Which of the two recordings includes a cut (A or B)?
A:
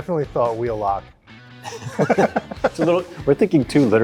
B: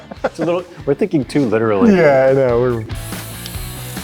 B